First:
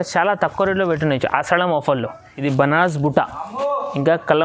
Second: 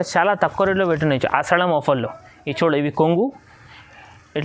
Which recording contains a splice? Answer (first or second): first